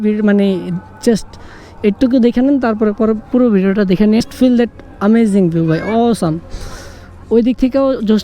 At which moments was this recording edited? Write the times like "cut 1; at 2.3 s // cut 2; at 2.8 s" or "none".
cut 1; at 4.2 s